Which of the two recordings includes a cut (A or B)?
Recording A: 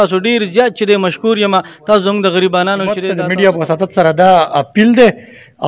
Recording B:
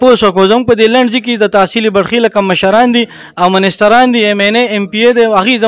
A